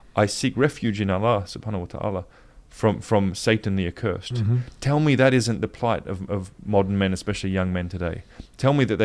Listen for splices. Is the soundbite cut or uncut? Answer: uncut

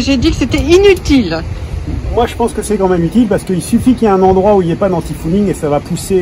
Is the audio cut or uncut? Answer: uncut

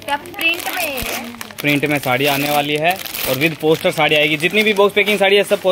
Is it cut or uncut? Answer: uncut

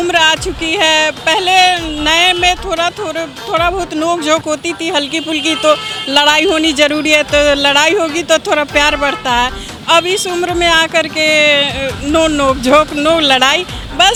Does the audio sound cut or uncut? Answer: uncut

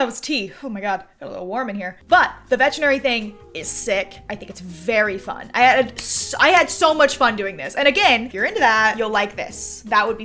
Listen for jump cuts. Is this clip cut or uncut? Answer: uncut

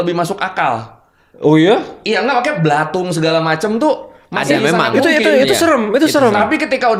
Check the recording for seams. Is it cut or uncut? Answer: uncut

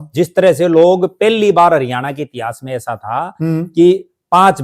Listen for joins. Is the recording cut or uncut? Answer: uncut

